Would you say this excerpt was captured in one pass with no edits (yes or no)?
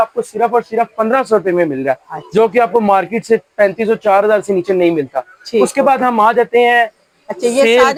yes